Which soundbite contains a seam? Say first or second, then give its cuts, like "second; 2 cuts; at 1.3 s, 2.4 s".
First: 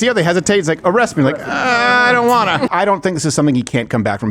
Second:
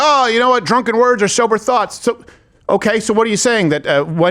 first; 1 cut; at 2.7 s